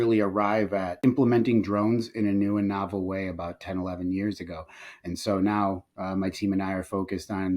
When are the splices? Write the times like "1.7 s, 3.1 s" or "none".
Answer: 0.9 s